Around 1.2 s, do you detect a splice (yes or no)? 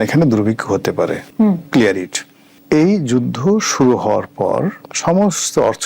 no